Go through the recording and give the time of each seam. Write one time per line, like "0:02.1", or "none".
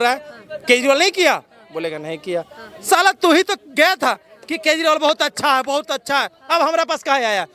none